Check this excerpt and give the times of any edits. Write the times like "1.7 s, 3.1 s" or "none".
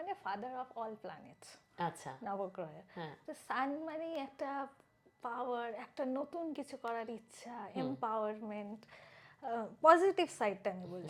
none